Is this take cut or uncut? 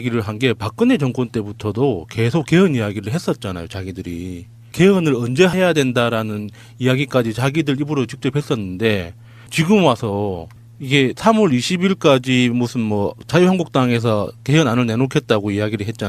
cut